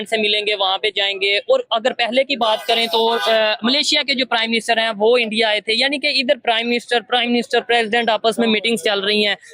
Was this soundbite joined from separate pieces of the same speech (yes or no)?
no